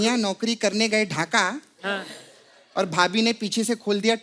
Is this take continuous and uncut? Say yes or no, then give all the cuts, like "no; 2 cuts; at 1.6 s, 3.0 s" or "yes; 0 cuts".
yes; 0 cuts